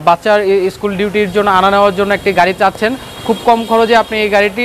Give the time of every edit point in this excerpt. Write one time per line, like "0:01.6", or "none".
none